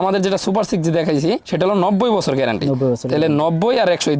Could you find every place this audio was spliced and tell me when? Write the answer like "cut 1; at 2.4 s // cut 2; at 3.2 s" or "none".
none